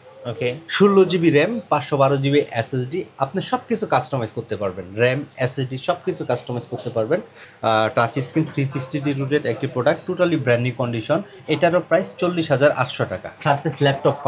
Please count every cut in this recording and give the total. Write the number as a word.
one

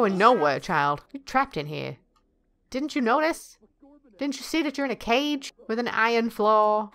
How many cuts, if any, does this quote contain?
zero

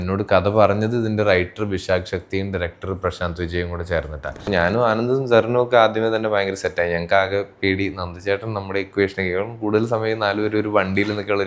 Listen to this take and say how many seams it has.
one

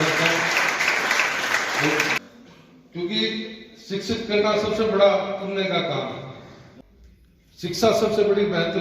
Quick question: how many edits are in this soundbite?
two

